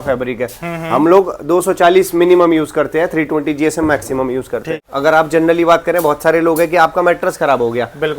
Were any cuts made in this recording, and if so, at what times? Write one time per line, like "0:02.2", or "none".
0:04.8